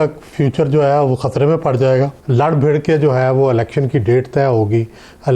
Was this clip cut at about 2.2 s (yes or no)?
yes